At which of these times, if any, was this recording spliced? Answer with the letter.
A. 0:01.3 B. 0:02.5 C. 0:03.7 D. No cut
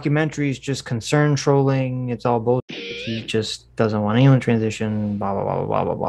D